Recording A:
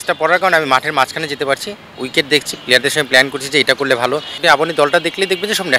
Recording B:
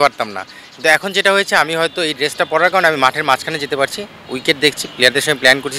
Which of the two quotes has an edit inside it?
A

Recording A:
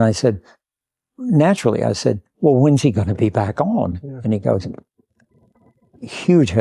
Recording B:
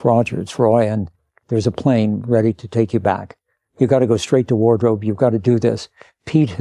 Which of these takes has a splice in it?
B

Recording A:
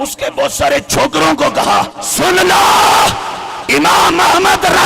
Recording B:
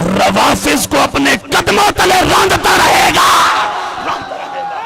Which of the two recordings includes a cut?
A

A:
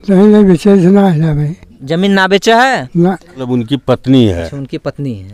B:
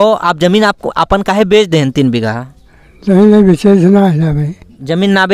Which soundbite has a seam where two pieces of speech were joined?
A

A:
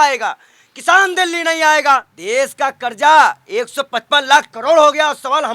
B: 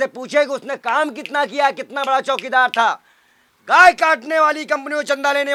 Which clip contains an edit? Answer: A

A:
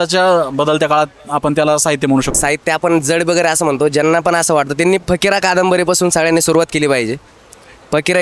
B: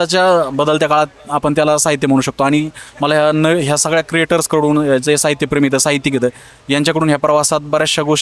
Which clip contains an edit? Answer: A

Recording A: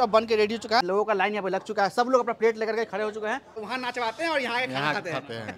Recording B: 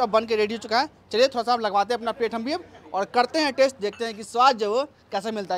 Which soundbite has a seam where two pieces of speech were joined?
A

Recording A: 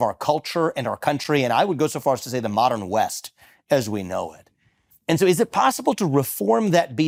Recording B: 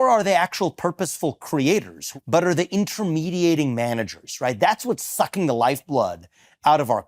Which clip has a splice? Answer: B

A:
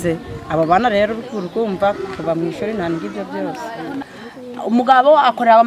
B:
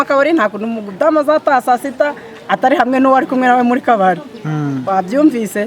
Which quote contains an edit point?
A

